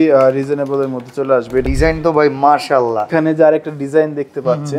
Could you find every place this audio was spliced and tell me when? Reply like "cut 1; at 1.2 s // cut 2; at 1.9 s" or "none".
cut 1; at 1.6 s // cut 2; at 3.1 s